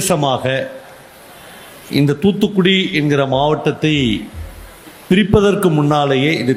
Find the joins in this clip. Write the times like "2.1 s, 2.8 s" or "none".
none